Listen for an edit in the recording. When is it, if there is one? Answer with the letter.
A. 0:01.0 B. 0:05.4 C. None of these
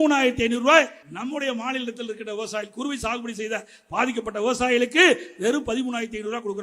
A